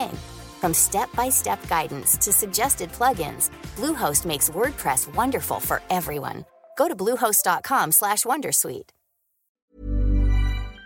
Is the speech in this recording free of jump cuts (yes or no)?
no